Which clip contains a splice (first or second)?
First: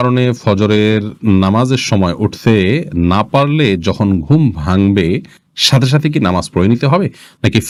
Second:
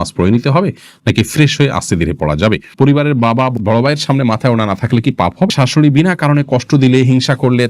second